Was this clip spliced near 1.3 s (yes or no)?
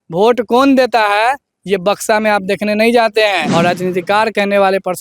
no